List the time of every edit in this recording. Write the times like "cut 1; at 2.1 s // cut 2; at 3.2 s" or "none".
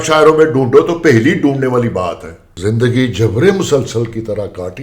cut 1; at 2.5 s